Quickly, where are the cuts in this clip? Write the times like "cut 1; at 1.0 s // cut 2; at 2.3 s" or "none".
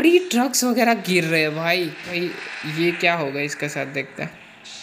cut 1; at 2.1 s